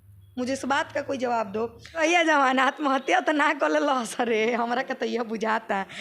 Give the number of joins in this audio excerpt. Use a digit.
1